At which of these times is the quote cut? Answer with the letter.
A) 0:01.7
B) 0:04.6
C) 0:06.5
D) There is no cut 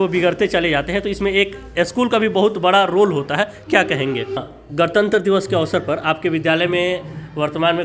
B